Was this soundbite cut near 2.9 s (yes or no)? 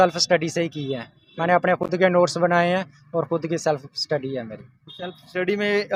no